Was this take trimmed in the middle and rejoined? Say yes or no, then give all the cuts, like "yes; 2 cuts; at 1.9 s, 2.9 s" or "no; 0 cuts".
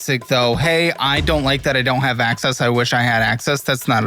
no; 0 cuts